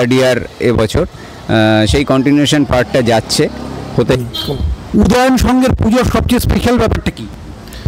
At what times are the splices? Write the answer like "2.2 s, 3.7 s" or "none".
4.2 s

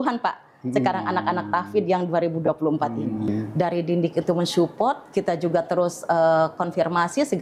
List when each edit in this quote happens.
3.3 s

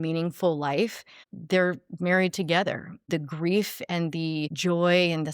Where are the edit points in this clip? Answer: 1.1 s, 3.1 s, 4.5 s

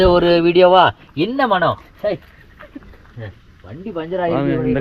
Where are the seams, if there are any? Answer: none

